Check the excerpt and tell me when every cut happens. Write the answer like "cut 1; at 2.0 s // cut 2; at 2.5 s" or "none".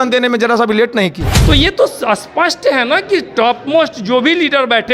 cut 1; at 1.3 s